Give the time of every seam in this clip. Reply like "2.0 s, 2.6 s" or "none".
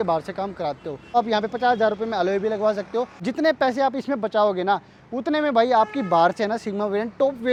none